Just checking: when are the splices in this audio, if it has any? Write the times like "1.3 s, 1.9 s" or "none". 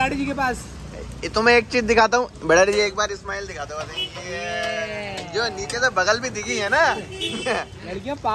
none